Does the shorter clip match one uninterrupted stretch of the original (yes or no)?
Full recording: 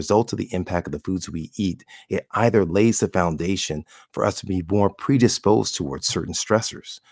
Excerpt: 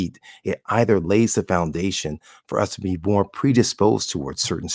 yes